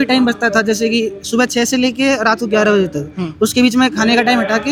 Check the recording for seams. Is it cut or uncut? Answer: uncut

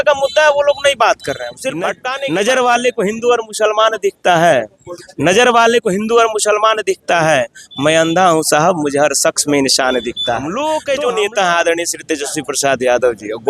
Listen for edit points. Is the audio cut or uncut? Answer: cut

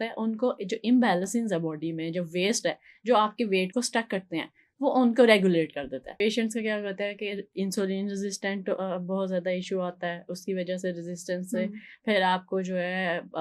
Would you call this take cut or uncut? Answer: cut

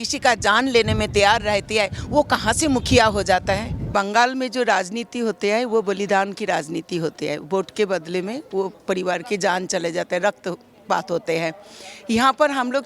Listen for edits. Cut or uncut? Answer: cut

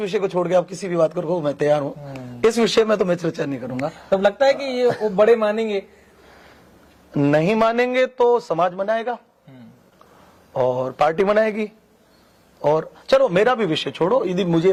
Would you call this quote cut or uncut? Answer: uncut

